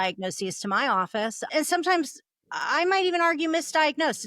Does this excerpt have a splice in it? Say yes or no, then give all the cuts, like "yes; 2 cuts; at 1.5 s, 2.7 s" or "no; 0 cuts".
yes; 1 cut; at 1.5 s